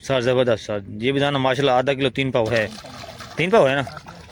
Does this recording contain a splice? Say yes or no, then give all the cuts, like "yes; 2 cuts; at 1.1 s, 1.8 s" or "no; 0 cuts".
no; 0 cuts